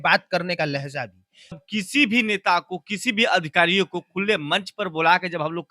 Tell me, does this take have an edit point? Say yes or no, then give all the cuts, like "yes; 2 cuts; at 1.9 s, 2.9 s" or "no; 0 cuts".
yes; 1 cut; at 1.6 s